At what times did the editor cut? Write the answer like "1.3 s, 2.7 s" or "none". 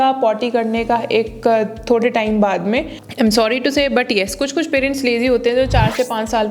3.0 s